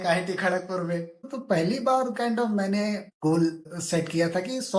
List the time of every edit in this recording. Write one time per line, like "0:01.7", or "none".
0:01.3
0:03.1
0:03.7